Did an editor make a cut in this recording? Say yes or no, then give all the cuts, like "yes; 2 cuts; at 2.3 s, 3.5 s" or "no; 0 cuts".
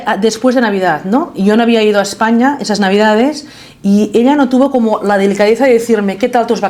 no; 0 cuts